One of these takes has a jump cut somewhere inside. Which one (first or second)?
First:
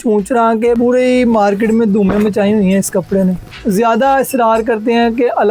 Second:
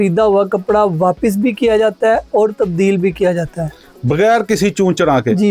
first